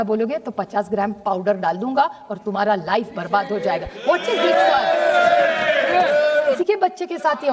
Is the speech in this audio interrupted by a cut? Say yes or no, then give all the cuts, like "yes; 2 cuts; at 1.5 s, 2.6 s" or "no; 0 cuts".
yes; 1 cut; at 6.6 s